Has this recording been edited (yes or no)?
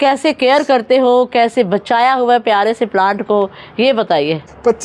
no